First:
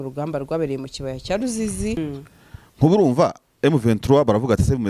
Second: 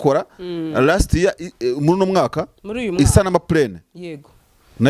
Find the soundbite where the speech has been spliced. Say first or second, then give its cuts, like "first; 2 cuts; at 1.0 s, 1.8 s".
first; 1 cut; at 2.0 s